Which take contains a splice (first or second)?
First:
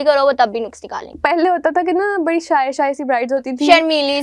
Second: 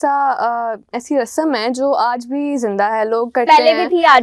first